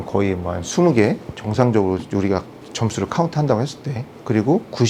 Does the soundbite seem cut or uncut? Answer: uncut